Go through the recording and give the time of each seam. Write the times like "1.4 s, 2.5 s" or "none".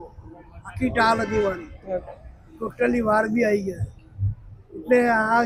none